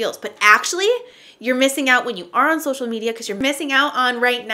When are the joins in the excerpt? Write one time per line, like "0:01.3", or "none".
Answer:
0:03.4